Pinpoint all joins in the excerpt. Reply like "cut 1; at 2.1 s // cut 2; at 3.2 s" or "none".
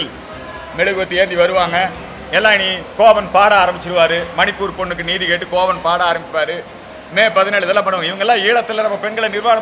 none